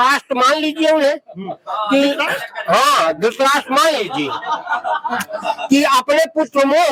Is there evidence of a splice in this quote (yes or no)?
no